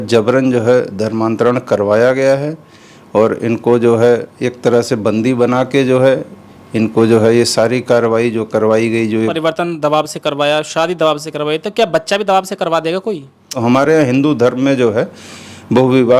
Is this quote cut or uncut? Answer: cut